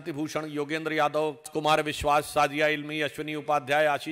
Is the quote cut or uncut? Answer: cut